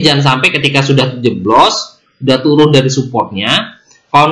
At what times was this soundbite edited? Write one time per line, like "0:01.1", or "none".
none